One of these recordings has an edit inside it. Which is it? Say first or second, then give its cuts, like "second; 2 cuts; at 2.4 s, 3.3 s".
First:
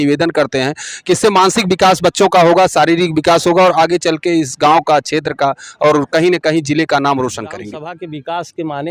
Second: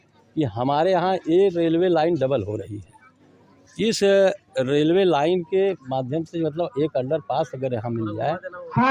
first; 1 cut; at 7.7 s